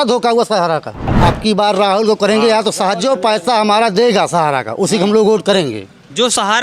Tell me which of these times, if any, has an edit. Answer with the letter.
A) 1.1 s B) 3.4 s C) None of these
A